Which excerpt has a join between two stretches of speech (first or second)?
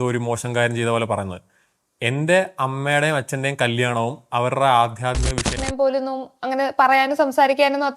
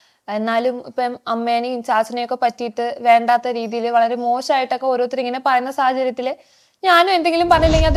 first